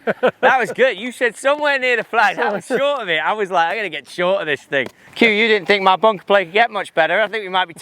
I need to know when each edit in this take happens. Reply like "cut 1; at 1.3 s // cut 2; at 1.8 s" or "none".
cut 1; at 5.0 s